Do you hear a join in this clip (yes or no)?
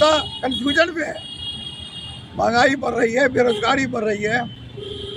no